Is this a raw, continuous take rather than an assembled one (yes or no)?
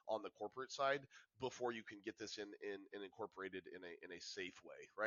yes